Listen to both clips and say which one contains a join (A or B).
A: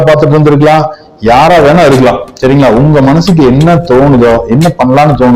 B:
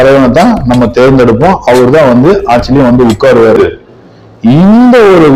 B